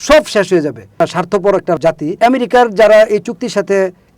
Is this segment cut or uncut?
cut